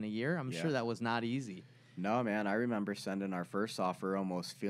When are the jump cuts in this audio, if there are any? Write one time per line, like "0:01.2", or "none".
none